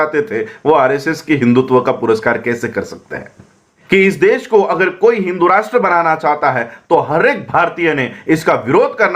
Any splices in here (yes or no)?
yes